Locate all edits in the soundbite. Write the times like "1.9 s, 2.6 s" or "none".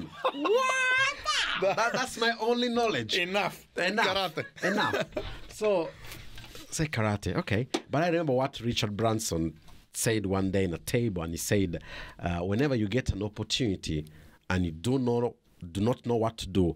none

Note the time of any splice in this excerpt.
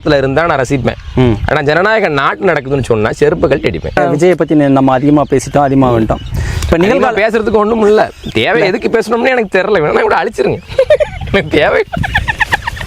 4.0 s

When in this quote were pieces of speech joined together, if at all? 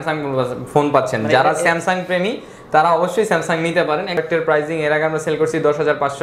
4.2 s

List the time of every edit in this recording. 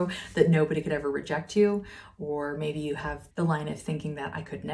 3.2 s

